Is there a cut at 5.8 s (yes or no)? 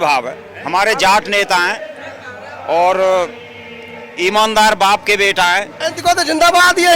yes